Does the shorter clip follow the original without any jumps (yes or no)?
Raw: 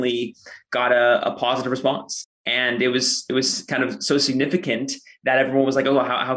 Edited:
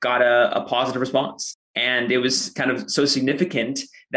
no